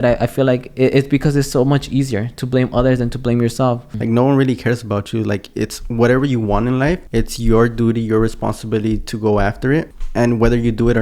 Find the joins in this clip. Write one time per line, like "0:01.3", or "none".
0:03.9
0:07.0
0:10.0